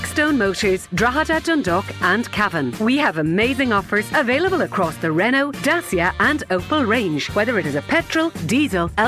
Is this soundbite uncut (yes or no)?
yes